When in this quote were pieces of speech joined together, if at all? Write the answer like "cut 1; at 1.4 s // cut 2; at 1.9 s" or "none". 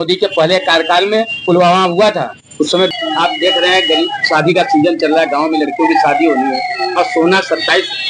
cut 1; at 2.9 s